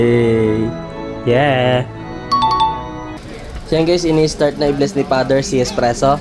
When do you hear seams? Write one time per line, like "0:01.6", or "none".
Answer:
0:03.2